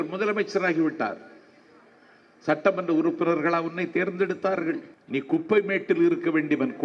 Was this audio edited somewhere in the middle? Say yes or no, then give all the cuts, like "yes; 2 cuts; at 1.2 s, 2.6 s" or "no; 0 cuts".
yes; 1 cut; at 4.9 s